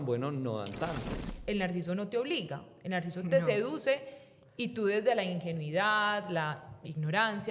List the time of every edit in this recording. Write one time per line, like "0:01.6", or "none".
0:01.2